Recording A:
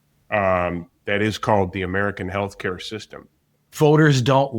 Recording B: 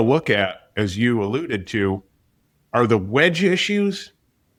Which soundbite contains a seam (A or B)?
A